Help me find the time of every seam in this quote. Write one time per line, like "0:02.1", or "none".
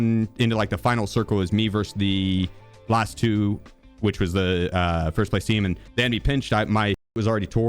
0:05.8